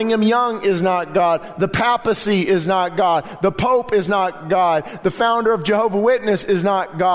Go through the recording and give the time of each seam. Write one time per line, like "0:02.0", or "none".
none